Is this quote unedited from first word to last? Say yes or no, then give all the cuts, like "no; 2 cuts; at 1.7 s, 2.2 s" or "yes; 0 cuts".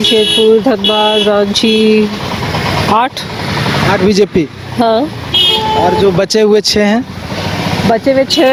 yes; 0 cuts